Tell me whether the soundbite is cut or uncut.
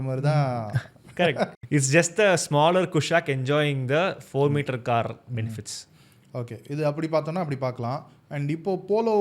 cut